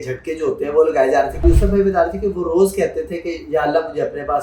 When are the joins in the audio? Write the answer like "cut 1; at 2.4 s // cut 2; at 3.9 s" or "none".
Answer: cut 1; at 1.4 s

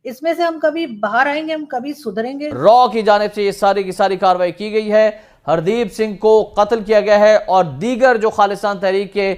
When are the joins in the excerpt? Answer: cut 1; at 2.6 s

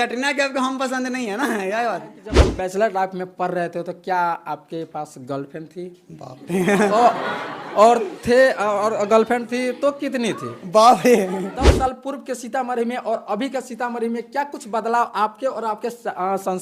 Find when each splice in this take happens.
cut 1; at 2.3 s // cut 2; at 11.7 s

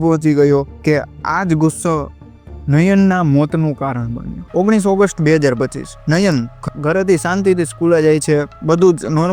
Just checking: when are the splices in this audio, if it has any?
none

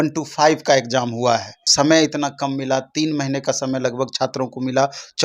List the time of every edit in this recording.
cut 1; at 1.6 s

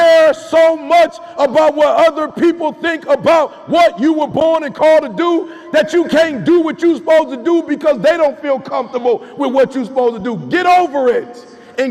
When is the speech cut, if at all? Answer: none

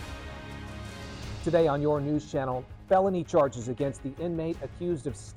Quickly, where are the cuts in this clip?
cut 1; at 1.4 s

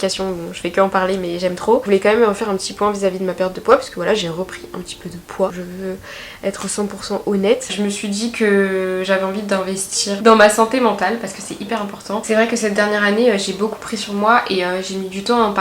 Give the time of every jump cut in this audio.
cut 1; at 1.8 s // cut 2; at 5.5 s // cut 3; at 7.7 s // cut 4; at 10.2 s // cut 5; at 12.2 s

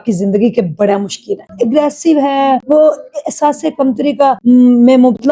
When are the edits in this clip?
cut 1; at 1.5 s // cut 2; at 2.6 s // cut 3; at 4.4 s

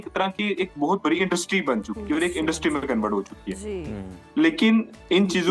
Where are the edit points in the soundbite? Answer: none

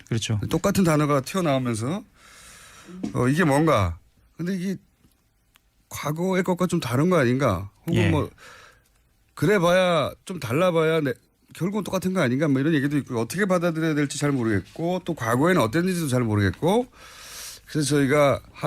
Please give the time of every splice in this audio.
cut 1; at 14.0 s

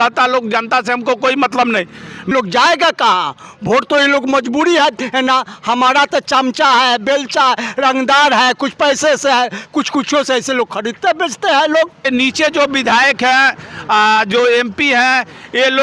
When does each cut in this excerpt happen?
cut 1; at 2.3 s // cut 2; at 12.0 s

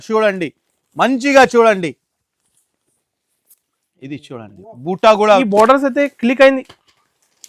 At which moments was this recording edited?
cut 1; at 5.4 s

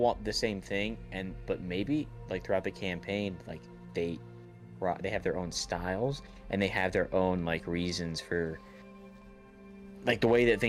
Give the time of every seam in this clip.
none

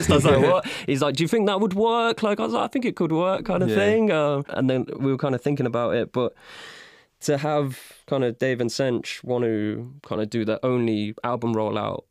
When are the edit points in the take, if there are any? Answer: cut 1; at 11.2 s

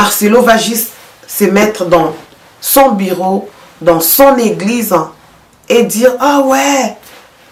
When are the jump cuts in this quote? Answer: none

